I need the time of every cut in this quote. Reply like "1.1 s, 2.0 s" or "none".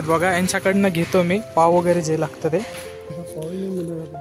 3.2 s